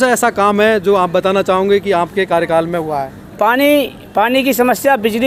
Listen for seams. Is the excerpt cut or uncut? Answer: uncut